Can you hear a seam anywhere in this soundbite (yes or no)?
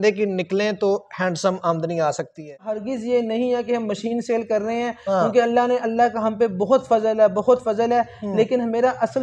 yes